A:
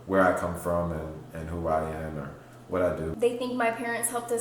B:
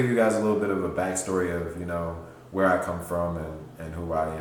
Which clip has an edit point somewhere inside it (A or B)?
A